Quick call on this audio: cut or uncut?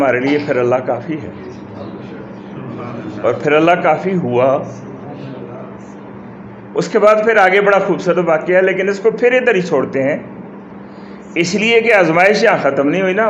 uncut